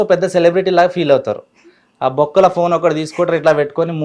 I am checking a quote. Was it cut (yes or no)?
no